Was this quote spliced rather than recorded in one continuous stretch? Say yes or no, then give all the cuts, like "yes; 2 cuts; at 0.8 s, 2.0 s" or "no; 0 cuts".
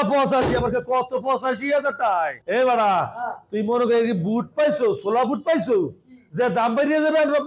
yes; 1 cut; at 2.4 s